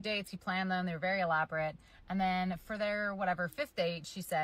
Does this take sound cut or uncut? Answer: cut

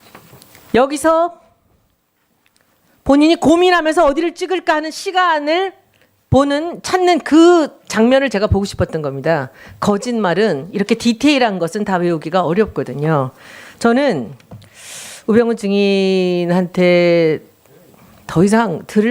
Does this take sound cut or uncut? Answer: uncut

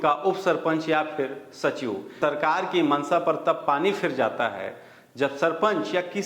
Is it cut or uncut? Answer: cut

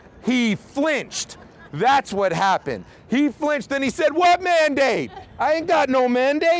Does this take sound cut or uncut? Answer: uncut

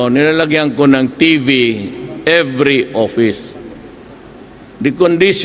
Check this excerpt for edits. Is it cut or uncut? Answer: uncut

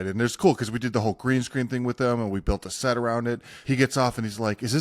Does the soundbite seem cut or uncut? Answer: cut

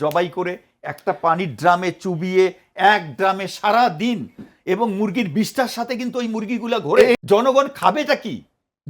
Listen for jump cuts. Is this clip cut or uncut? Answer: cut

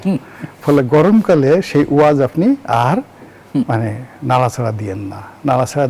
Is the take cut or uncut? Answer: uncut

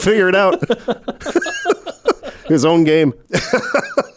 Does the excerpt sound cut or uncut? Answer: cut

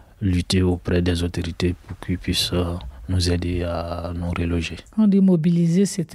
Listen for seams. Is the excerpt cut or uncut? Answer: cut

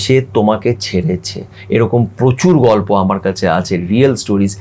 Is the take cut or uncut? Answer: uncut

